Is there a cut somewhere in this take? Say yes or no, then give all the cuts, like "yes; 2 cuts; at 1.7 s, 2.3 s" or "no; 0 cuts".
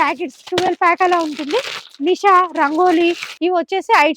yes; 1 cut; at 3.3 s